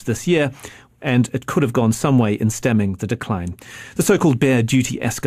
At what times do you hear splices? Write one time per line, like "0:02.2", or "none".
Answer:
0:01.8